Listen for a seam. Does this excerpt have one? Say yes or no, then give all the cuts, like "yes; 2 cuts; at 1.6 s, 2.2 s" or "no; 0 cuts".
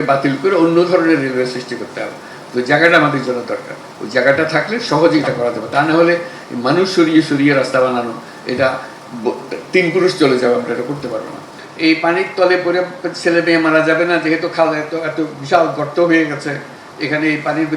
yes; 1 cut; at 11.6 s